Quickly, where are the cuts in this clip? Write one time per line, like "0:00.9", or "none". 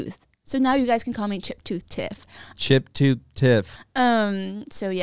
0:03.7